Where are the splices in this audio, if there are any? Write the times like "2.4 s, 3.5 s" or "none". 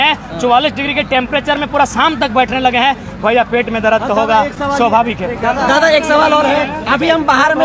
none